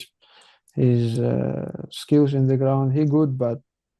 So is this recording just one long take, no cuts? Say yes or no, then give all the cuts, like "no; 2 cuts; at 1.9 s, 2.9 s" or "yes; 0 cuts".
yes; 0 cuts